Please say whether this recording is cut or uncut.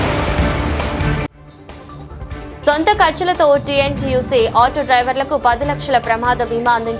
cut